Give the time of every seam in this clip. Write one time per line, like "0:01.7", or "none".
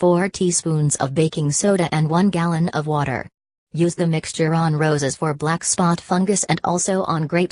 0:04.4